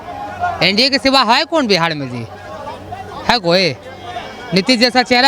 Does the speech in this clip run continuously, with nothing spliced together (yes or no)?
yes